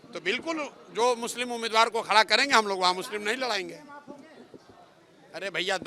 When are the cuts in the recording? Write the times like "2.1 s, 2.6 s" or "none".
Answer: none

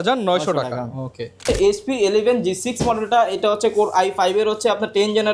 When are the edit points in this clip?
1.4 s

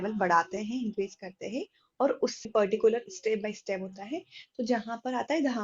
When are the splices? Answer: 2.4 s

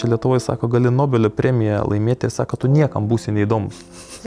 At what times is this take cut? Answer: none

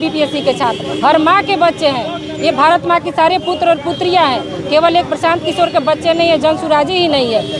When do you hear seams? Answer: none

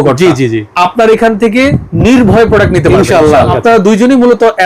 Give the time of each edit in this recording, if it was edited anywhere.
3.6 s

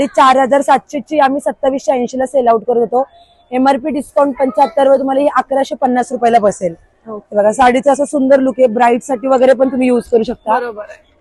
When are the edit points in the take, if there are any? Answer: none

